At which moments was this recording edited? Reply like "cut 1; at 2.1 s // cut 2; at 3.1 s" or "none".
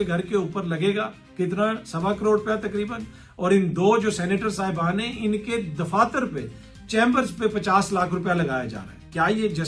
none